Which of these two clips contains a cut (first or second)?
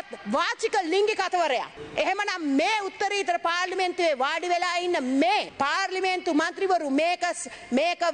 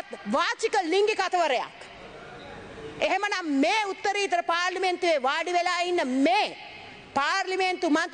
first